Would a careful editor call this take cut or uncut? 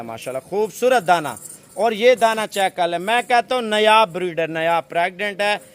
uncut